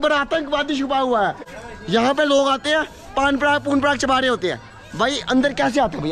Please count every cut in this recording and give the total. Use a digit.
1